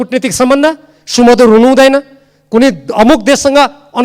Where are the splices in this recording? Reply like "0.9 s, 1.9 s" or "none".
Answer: none